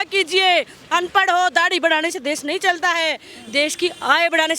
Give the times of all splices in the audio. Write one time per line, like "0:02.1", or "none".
none